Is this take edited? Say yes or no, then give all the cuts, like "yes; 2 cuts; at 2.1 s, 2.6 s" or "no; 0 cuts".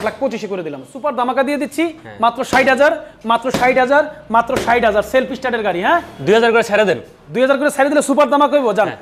yes; 1 cut; at 0.9 s